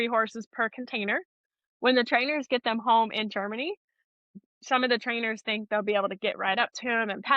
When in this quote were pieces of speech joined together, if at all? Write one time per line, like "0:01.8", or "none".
0:01.4
0:04.3